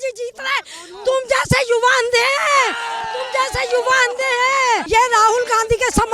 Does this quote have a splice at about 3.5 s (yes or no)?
no